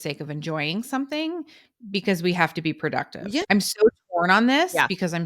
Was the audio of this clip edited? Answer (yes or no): yes